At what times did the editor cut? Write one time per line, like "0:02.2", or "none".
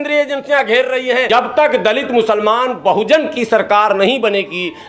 0:01.3